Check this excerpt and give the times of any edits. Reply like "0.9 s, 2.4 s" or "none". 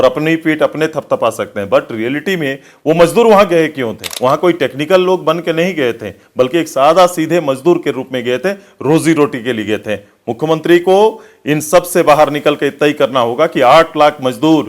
4.0 s